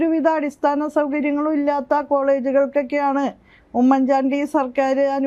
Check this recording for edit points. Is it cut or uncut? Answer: uncut